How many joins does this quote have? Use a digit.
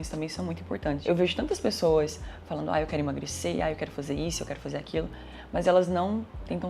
1